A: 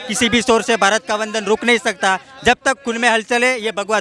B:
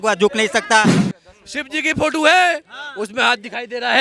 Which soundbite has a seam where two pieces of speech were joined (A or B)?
B